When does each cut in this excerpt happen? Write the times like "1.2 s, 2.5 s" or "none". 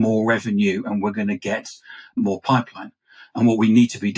2.2 s